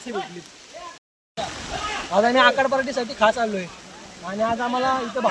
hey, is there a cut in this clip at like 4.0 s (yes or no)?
no